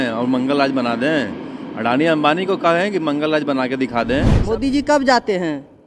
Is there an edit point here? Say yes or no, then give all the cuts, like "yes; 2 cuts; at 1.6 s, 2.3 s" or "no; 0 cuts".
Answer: yes; 1 cut; at 4.3 s